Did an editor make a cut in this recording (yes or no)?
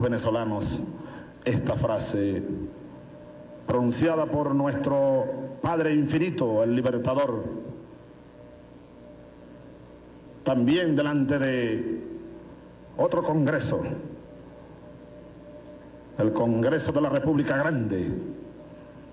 yes